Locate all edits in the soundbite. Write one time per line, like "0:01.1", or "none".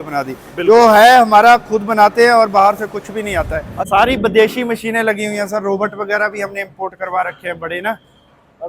0:03.8